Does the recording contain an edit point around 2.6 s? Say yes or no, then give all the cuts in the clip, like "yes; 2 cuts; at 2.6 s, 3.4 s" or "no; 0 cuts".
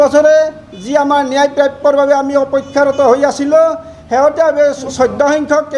no; 1 cut; at 4.8 s